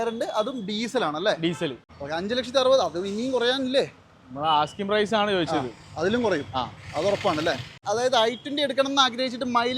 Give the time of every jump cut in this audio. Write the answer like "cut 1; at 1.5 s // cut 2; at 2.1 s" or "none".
cut 1; at 1.9 s // cut 2; at 7.8 s